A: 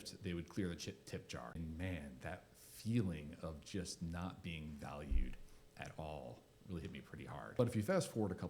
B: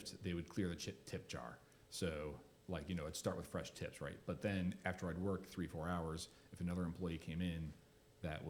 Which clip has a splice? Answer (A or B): A